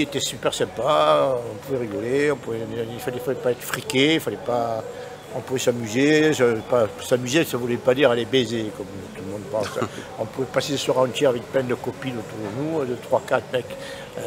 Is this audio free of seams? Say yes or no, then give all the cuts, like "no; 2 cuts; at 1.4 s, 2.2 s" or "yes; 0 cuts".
yes; 0 cuts